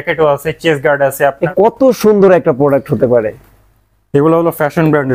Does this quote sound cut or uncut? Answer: cut